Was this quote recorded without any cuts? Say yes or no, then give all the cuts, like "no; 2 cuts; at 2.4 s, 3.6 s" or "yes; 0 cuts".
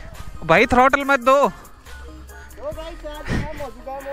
yes; 0 cuts